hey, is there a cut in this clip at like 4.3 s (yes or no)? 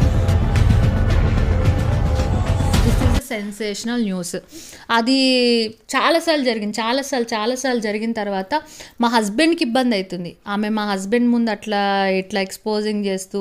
no